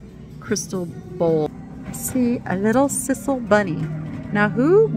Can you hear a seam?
yes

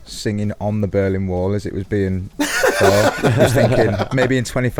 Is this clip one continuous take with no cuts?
yes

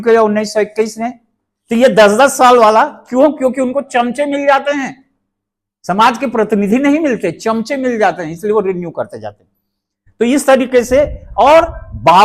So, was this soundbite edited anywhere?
no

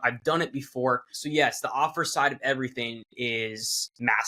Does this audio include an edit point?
no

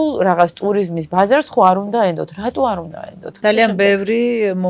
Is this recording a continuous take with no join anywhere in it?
no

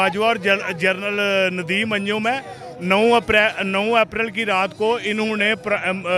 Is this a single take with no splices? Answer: yes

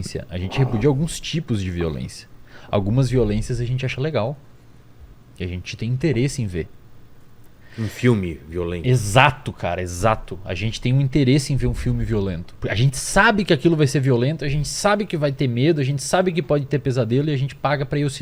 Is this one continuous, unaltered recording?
yes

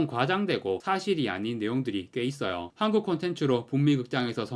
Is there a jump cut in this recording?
yes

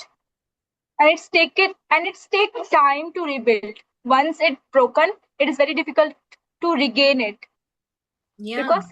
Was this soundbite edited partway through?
no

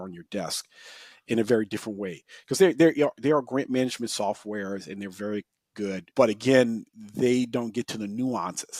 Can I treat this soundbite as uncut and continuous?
no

